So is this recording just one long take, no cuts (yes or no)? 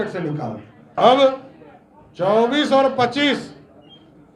no